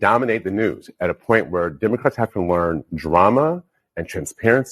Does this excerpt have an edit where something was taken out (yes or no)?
no